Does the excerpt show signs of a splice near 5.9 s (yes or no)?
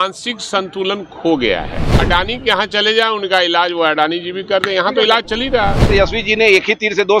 yes